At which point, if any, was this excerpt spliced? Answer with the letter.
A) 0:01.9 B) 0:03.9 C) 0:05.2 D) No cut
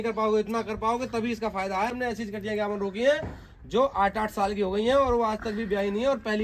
A